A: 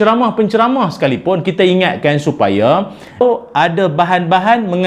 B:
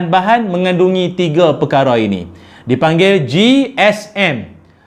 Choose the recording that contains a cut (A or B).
A